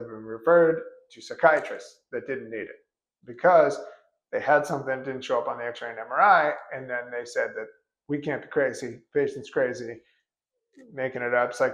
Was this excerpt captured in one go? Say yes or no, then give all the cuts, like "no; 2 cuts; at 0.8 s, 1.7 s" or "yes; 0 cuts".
yes; 0 cuts